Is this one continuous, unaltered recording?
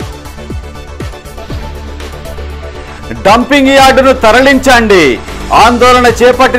no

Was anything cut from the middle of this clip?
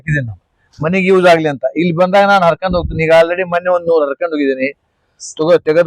no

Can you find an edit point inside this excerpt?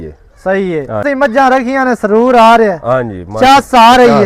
yes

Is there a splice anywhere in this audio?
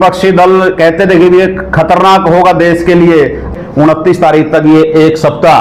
yes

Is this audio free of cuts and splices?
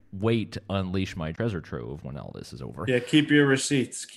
no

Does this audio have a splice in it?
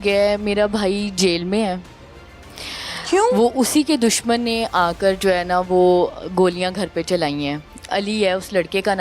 no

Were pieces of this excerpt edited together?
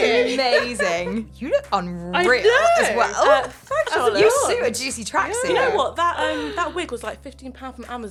no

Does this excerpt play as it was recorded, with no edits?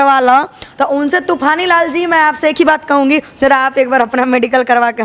yes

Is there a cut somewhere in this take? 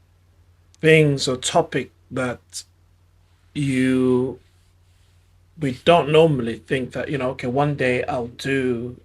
no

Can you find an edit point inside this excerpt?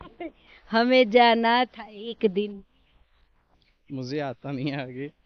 no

